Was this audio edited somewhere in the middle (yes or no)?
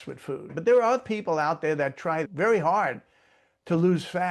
no